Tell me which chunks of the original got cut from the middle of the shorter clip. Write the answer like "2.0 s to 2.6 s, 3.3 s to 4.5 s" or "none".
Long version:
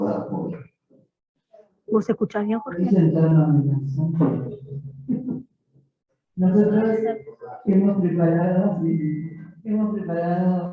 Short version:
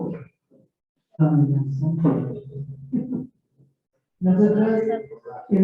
1.6 s to 3.4 s